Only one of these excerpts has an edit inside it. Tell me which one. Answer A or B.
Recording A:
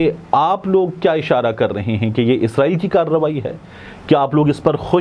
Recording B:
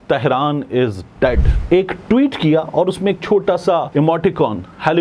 B